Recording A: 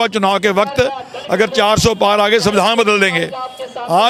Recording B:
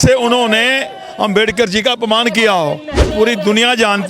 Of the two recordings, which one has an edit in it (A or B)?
B